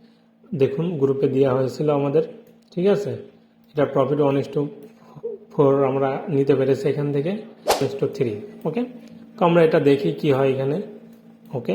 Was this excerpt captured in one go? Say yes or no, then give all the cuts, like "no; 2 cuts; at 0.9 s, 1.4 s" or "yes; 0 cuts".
no; 1 cut; at 7.8 s